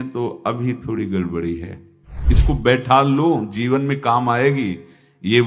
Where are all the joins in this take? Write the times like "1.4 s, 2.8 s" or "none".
2.2 s